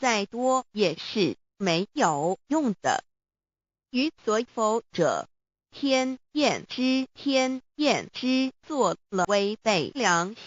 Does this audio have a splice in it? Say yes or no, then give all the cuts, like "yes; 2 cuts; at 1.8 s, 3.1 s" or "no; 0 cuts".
yes; 1 cut; at 9.2 s